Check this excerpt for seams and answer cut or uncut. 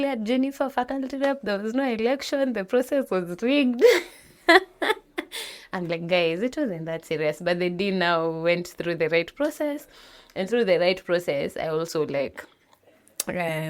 uncut